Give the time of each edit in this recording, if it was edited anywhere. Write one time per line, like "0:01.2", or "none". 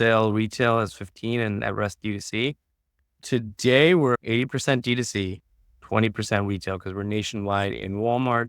0:04.2